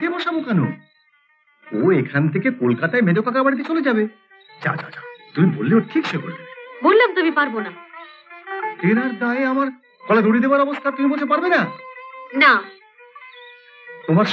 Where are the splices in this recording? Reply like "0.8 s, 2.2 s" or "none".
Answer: none